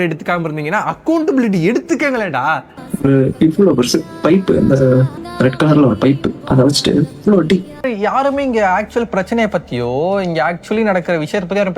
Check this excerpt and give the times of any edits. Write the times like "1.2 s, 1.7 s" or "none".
2.7 s, 5.2 s, 7.8 s